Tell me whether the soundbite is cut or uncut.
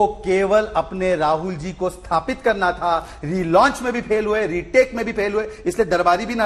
uncut